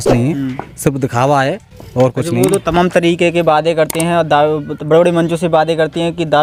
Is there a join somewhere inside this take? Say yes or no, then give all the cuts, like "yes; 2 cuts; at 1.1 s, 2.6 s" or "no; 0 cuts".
no; 0 cuts